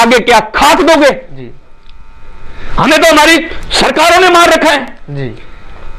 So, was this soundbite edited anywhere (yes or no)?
no